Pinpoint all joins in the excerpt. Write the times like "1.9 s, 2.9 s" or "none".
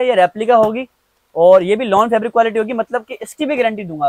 none